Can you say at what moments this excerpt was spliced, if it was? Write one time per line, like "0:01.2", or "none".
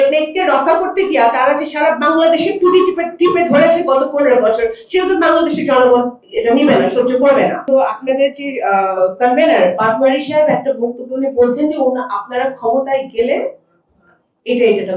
0:07.6